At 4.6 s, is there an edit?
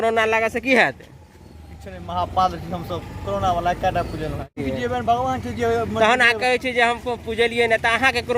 yes; 1 cut; at 4.6 s

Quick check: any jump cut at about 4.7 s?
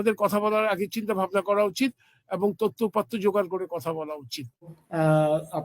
yes; 1 cut; at 4.7 s

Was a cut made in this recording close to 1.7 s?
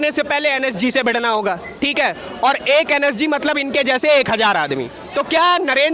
no; 1 cut; at 5.0 s

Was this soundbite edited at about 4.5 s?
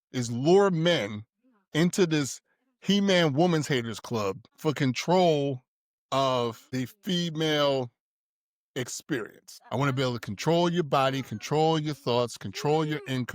yes; 3 cuts; at 4.5 s, 6.6 s, 9.5 s

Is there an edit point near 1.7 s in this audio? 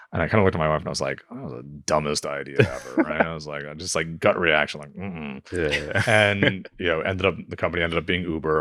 no; 0 cuts

